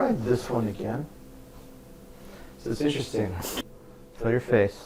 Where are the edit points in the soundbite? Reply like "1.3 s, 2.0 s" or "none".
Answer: 3.6 s